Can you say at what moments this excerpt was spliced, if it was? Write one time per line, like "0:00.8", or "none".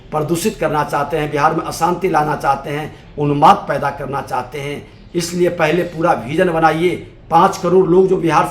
none